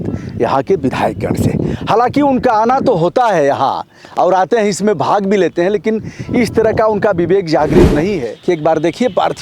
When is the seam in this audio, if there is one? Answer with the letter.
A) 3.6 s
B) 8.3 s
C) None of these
B